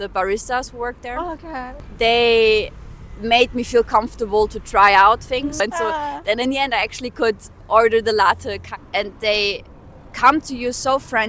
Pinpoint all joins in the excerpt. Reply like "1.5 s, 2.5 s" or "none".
1.7 s, 5.7 s, 8.6 s